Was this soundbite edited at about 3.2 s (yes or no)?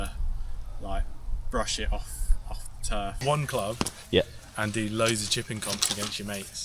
yes